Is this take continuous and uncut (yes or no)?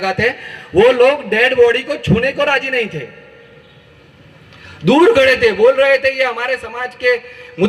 yes